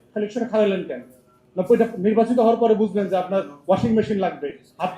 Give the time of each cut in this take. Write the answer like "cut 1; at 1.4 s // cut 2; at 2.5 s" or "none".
none